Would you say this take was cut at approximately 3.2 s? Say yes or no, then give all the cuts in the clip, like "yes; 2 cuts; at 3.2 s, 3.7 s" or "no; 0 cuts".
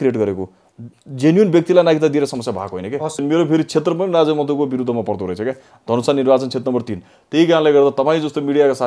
yes; 1 cut; at 3.2 s